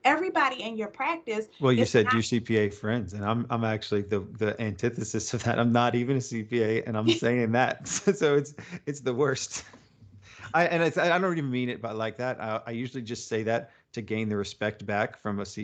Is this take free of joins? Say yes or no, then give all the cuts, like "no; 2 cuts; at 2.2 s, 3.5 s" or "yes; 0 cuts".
yes; 0 cuts